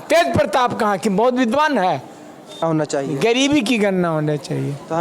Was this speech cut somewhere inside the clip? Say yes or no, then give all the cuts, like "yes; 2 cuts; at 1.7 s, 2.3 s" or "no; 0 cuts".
yes; 1 cut; at 2.6 s